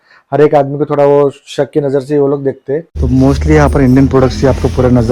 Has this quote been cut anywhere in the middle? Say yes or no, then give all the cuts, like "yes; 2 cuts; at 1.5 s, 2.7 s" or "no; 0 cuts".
yes; 1 cut; at 2.9 s